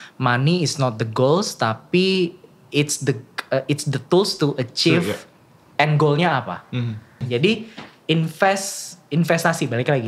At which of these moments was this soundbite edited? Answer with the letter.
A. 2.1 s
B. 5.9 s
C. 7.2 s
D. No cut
C